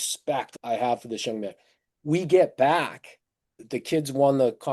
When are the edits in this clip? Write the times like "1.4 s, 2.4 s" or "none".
3.6 s